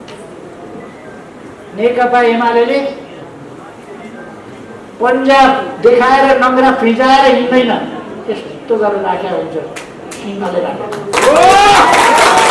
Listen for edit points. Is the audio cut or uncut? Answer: uncut